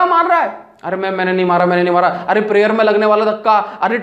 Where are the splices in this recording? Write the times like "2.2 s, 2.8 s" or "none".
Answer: none